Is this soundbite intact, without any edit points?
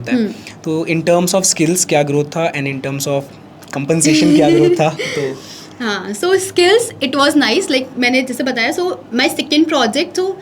yes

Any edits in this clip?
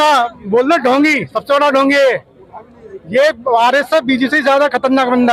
no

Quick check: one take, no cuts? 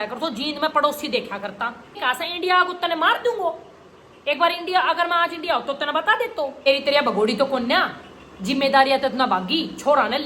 no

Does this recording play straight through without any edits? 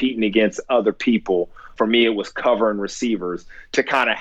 no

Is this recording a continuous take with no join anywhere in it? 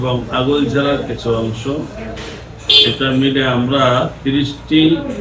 yes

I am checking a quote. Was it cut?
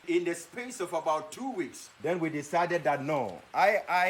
yes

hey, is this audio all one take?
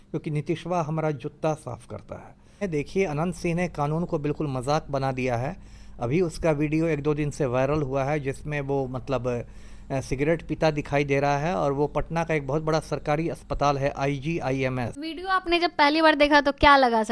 no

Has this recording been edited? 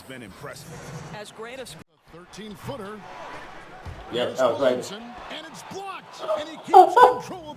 yes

